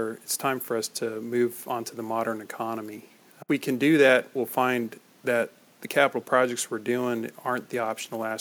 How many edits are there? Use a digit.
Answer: 0